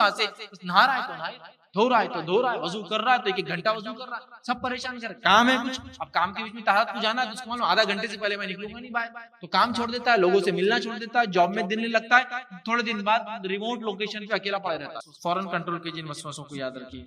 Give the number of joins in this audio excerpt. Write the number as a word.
one